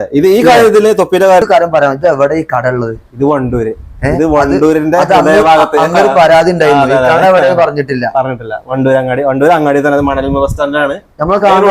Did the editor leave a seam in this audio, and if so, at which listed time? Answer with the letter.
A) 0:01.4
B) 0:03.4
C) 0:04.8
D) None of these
A